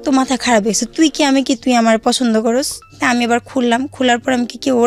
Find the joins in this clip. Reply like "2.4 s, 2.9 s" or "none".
2.8 s